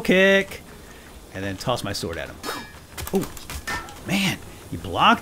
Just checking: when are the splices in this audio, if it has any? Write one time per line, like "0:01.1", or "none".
none